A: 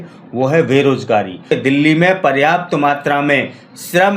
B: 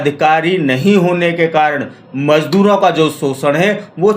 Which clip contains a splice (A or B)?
A